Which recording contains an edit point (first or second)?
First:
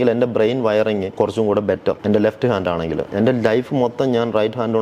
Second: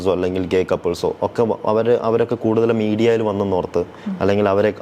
first